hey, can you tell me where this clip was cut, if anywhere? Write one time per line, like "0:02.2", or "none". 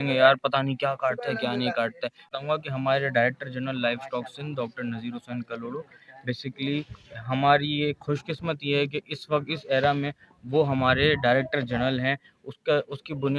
0:02.3